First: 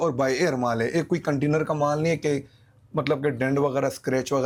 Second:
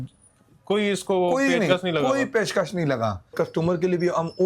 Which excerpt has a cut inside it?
second; 1 cut; at 3.3 s

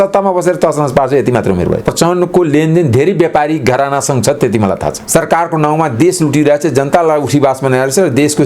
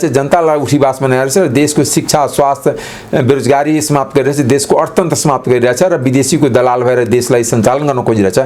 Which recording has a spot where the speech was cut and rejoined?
first; 2 cuts; at 1.9 s, 5.0 s

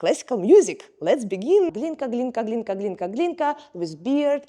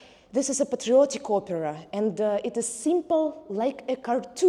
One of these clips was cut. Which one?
first; 1 cut; at 1.7 s

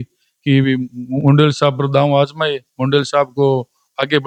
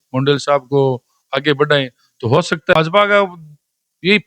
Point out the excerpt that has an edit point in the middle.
second; 1 cut; at 2.7 s

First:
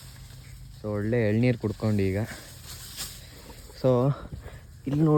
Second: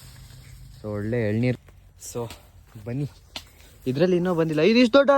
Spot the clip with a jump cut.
second; 1 cut; at 1.6 s

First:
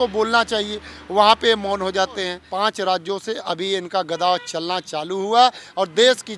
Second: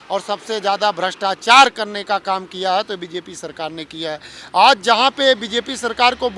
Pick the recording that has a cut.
first; 1 cut; at 2.4 s

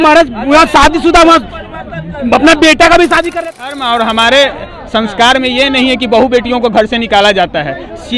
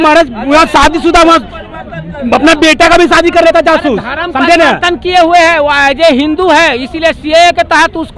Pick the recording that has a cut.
first; 1 cut; at 3.5 s

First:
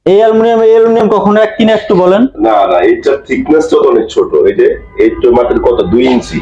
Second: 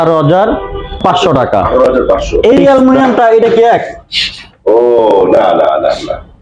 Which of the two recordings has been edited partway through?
second; 1 cut; at 2.4 s

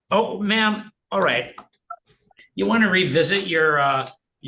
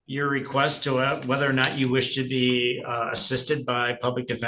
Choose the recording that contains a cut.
first; 1 cut; at 2.4 s

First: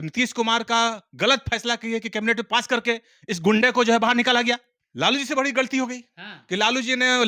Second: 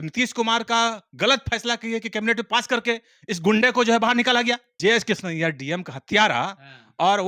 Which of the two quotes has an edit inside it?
second; 1 cut; at 4.7 s

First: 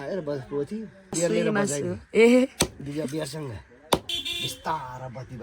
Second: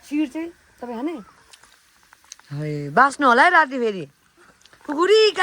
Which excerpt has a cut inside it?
first; 2 cuts; at 1.2 s, 4.2 s

